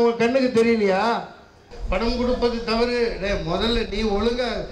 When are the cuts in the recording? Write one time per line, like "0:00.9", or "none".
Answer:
0:01.7